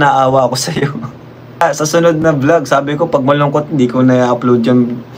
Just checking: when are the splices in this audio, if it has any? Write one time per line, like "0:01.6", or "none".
0:01.6